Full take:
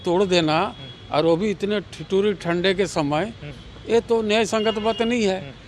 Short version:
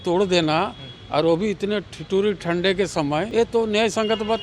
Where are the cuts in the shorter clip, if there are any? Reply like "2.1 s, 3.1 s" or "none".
3.3 s

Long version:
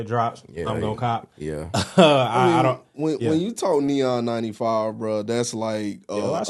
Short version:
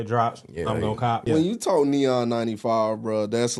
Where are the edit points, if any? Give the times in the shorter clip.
1.2 s

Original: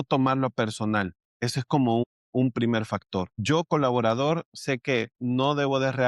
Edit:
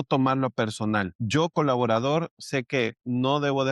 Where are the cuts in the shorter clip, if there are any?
1.2 s

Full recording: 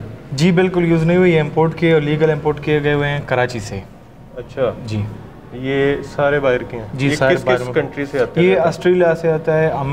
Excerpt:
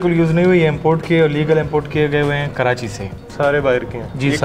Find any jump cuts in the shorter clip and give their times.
3.3 s

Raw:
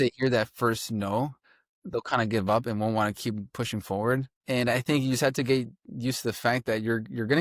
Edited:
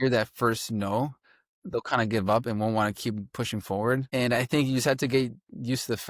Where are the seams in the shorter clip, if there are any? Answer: 4.1 s

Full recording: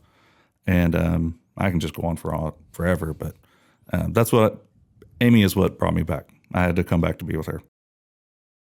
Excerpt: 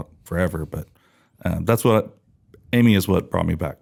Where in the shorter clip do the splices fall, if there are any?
none

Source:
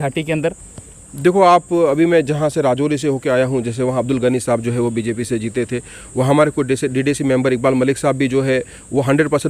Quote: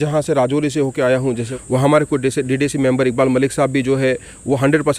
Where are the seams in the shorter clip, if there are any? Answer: 1.5 s

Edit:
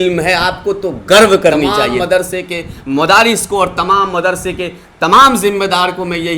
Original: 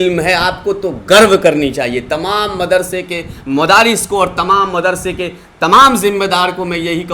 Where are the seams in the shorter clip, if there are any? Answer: 1.9 s

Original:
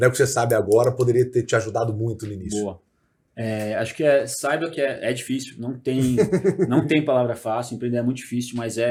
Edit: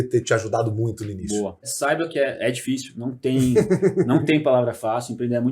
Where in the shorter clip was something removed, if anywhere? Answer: 1.7 s

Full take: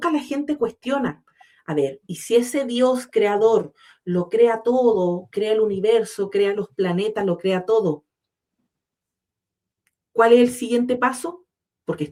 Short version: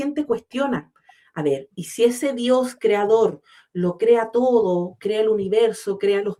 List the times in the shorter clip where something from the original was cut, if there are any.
none

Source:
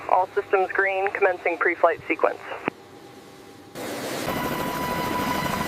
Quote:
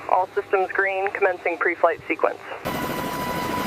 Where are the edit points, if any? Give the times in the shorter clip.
2.6 s

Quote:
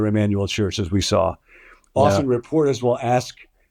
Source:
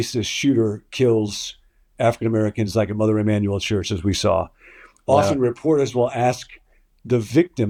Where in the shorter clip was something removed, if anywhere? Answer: none

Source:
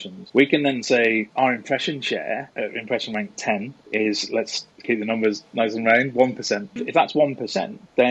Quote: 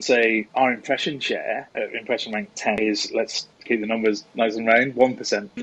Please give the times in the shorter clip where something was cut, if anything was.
2.8 s

